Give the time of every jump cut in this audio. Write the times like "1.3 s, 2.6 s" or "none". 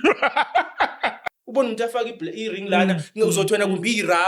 1.2 s